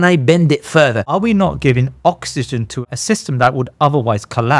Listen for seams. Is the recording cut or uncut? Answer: cut